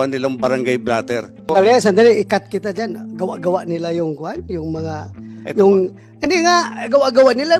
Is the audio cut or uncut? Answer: cut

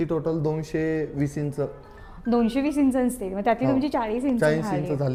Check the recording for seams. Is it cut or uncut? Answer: uncut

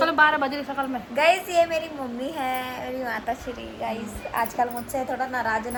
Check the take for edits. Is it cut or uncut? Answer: uncut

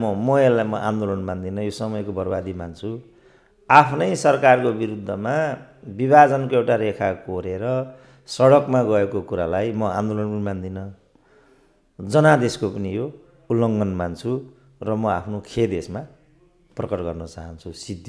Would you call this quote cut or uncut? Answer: uncut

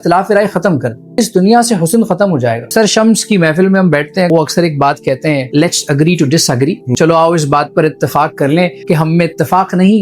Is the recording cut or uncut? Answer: cut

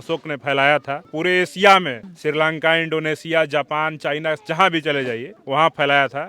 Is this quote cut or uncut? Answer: cut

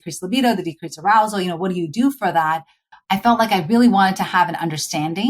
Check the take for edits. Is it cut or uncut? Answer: cut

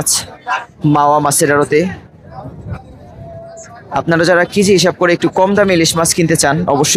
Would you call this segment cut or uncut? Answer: uncut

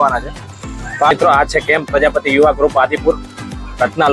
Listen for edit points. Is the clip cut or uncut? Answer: cut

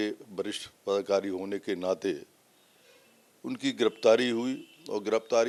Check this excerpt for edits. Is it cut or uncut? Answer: uncut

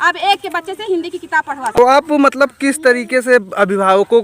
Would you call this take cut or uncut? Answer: cut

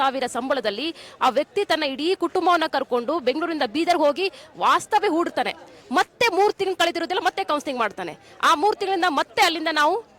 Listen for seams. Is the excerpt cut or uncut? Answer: uncut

